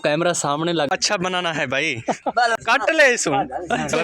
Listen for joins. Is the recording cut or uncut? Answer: cut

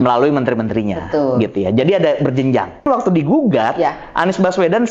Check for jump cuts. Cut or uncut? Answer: cut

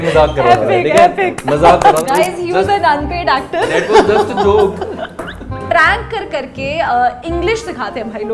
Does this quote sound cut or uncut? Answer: cut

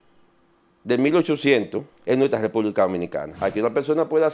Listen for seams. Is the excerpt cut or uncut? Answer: cut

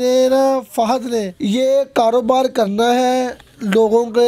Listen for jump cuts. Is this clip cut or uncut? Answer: cut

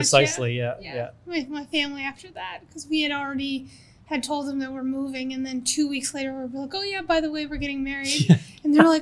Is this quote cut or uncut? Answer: uncut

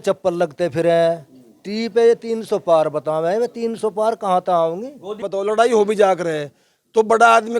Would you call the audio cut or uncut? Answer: cut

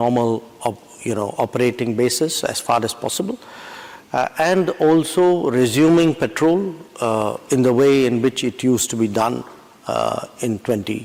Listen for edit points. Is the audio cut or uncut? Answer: uncut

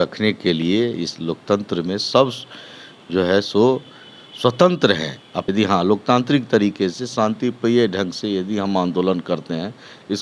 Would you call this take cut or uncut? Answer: cut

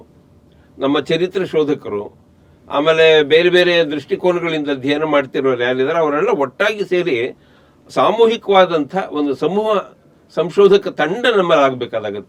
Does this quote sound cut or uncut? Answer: uncut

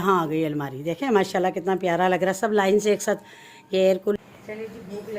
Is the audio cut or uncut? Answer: cut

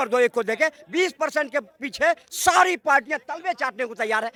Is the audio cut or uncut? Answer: uncut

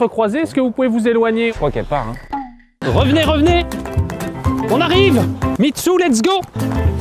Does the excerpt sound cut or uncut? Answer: cut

